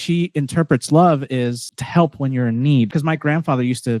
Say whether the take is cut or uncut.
cut